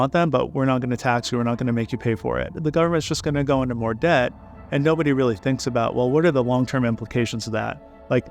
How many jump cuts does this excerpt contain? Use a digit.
1